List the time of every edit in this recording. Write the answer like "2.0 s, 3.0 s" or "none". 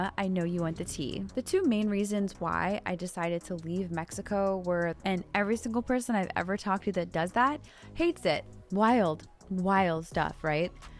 1.3 s, 5.0 s, 8.5 s